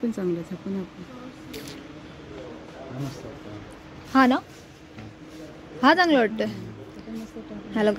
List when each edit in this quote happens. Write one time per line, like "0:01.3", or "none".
none